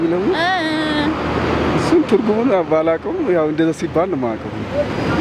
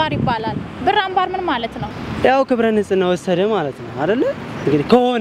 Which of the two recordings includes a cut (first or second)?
second